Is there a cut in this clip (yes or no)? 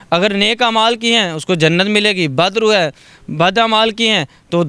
no